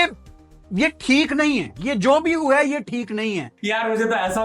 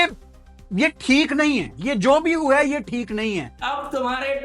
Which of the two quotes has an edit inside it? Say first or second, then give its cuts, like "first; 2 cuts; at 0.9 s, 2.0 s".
second; 1 cut; at 3.5 s